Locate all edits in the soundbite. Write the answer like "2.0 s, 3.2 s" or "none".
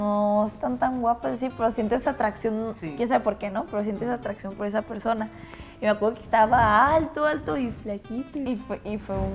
8.4 s

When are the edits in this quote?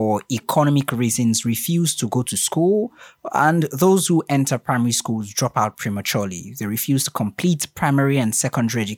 none

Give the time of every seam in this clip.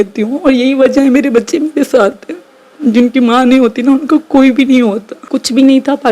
5.2 s

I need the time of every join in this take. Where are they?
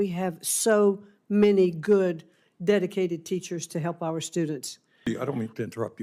5.1 s

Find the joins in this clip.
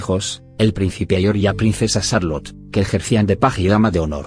1.0 s

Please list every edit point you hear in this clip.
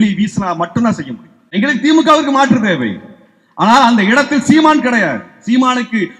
1.5 s

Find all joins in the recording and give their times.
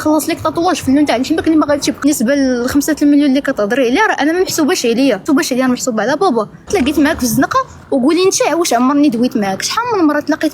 2.0 s, 5.2 s, 6.7 s

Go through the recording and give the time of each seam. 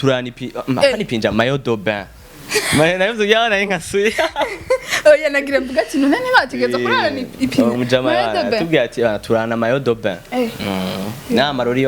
none

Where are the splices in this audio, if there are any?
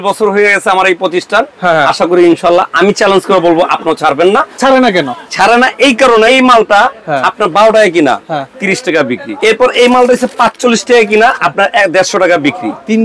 4.5 s, 6.3 s, 9.3 s

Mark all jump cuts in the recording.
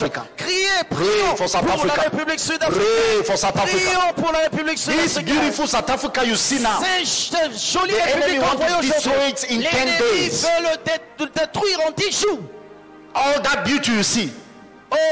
4.8 s

